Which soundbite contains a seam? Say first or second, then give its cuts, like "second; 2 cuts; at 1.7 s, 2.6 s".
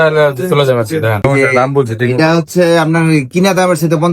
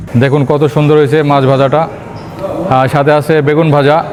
first; 1 cut; at 1.2 s